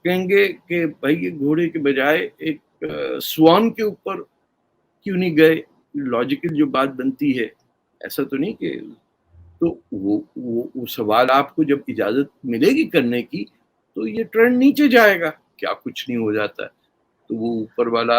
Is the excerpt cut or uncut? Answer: cut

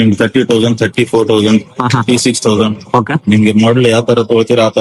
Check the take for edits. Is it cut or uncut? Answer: uncut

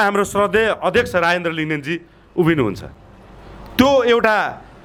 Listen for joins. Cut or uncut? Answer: uncut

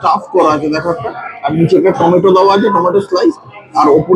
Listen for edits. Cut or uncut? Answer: uncut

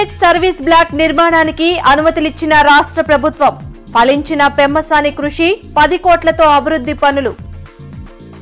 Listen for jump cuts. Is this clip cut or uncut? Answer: uncut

